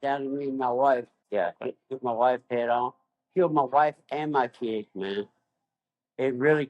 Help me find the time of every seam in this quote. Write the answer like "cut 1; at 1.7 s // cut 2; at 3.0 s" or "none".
cut 1; at 1.2 s